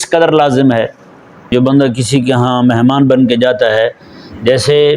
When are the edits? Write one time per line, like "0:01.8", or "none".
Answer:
0:01.4

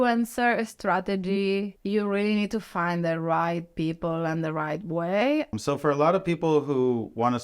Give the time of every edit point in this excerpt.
0:01.8
0:05.5

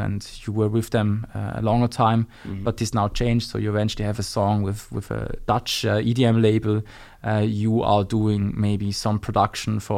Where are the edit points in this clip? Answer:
none

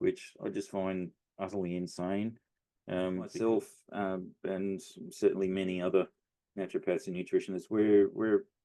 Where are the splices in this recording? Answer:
0:03.3

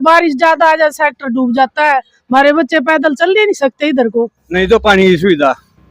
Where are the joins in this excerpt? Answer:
0:04.4

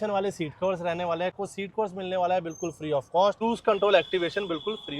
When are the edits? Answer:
0:01.3
0:03.4

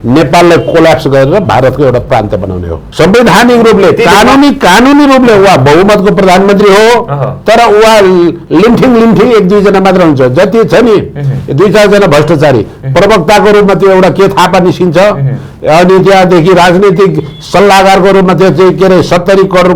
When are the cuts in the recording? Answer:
0:02.8

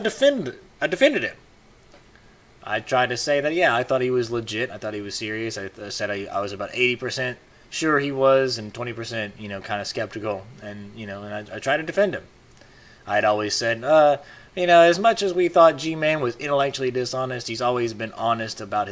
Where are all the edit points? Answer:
0:07.1

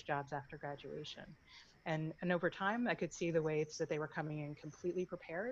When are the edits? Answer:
none

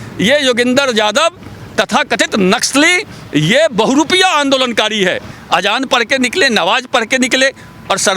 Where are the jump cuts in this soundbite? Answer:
0:05.3

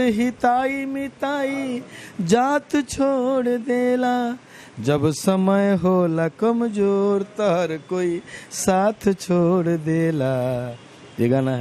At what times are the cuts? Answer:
none

